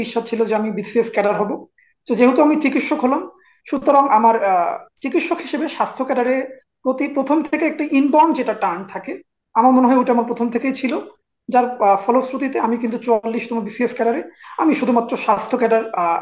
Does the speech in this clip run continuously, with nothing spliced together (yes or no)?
yes